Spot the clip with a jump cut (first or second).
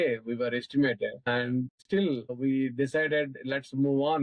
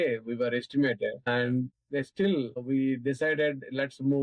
first